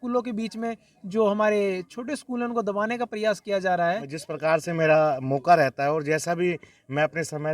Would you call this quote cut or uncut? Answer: cut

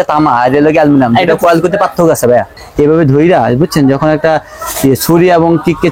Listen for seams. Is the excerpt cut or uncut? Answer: cut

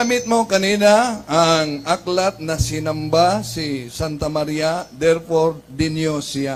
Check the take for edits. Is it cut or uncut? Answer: uncut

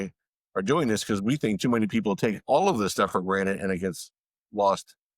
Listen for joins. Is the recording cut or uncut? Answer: uncut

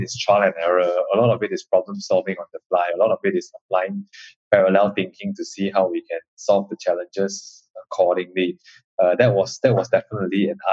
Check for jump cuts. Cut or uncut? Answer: uncut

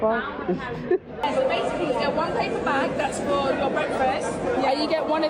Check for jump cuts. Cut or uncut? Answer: cut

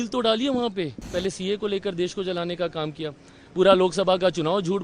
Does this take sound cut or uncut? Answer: cut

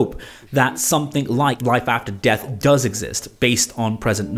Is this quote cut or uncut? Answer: cut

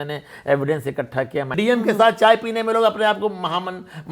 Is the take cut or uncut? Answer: cut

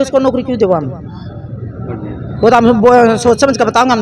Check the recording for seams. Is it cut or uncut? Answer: uncut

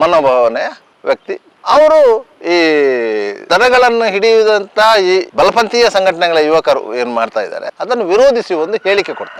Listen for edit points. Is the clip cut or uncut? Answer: uncut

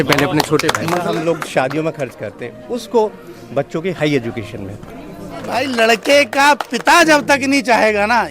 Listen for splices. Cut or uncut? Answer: cut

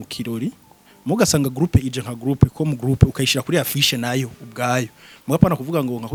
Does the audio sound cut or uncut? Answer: uncut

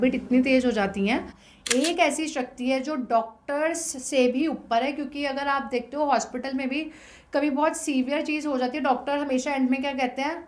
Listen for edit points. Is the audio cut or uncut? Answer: cut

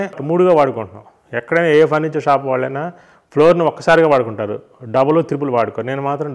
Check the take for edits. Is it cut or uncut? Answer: uncut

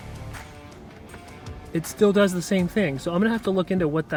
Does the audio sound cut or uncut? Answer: uncut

